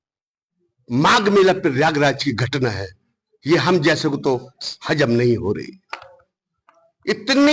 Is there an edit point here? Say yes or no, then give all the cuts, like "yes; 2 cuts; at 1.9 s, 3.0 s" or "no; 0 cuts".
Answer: no; 0 cuts